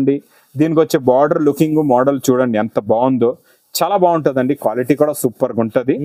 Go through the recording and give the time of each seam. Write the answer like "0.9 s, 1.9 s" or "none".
none